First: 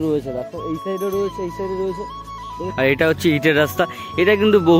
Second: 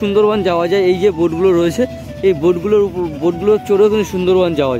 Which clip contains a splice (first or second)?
first